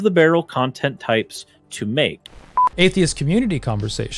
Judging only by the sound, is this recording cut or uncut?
cut